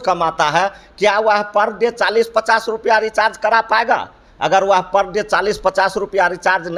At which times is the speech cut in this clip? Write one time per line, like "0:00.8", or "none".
none